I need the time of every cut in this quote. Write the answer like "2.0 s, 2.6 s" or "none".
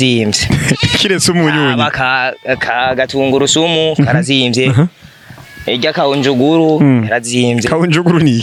none